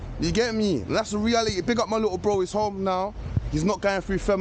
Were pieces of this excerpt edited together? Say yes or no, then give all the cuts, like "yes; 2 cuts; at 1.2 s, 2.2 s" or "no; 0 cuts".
no; 0 cuts